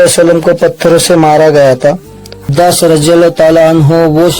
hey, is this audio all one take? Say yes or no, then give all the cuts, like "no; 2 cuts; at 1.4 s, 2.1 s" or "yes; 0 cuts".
no; 1 cut; at 2.5 s